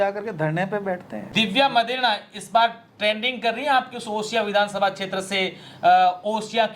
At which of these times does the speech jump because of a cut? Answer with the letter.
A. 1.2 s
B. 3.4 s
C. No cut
A